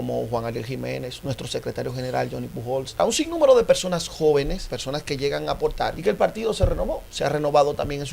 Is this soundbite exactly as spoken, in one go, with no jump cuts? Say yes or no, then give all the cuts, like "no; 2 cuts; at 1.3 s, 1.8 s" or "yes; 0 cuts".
no; 3 cuts; at 3.0 s, 4.7 s, 6.0 s